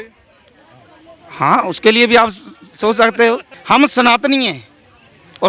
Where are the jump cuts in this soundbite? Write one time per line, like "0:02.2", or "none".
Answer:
0:03.5